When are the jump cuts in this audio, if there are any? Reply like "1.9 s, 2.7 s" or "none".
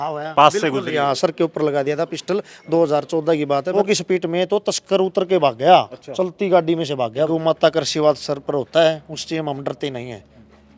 3.8 s, 7.3 s